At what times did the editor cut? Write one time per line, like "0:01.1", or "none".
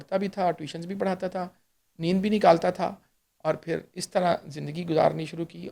none